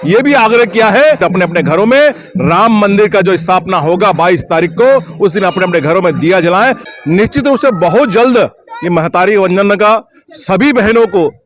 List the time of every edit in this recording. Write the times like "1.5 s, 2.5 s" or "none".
1.2 s, 6.8 s